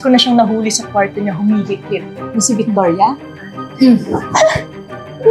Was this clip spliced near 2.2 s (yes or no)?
yes